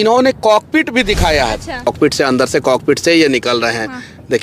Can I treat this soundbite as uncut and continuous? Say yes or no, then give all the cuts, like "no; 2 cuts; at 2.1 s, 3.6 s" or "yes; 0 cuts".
no; 1 cut; at 1.9 s